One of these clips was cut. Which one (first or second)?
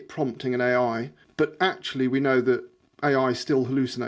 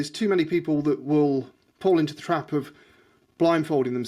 first